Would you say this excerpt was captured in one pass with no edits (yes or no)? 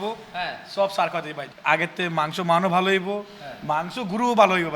no